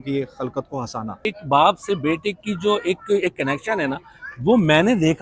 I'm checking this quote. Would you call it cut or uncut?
cut